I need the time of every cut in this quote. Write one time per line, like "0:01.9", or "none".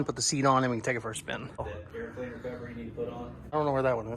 0:01.8
0:03.4